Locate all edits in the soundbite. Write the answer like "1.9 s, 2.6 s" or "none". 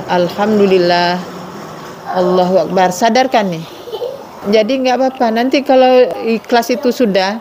4.3 s, 6.1 s